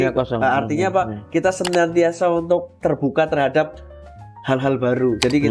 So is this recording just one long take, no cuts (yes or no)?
yes